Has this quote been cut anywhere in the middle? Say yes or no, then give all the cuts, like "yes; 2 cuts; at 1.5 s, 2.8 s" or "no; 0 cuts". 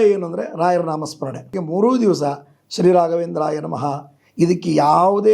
yes; 1 cut; at 1.6 s